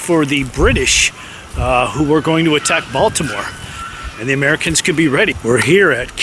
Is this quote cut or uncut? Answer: cut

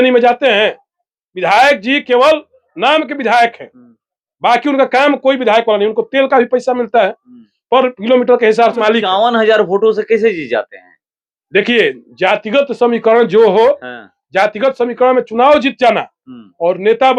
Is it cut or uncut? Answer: cut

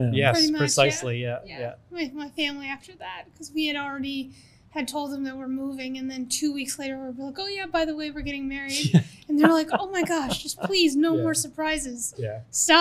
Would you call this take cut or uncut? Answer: uncut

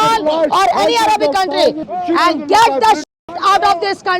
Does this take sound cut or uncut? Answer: cut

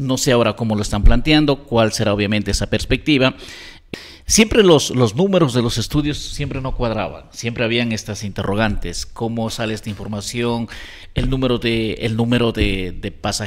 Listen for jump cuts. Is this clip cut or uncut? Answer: cut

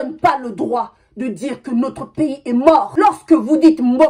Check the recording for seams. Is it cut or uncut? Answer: uncut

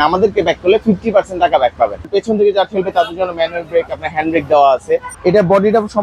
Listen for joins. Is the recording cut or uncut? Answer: cut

